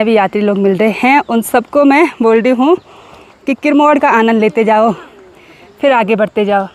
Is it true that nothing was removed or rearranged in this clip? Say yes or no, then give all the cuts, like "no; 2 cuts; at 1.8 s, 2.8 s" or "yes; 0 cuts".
yes; 0 cuts